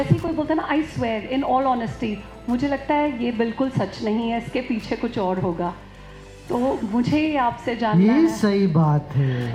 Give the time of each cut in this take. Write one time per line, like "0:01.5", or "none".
none